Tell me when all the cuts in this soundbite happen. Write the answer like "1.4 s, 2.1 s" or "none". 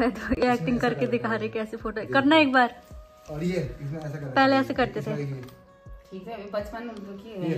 none